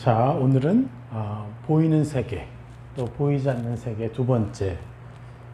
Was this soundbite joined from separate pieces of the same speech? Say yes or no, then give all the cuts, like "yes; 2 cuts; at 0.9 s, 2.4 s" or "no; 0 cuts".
no; 0 cuts